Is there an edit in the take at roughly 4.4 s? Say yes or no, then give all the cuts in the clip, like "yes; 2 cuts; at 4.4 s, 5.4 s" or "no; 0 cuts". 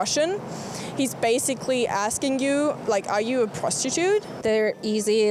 yes; 1 cut; at 4.4 s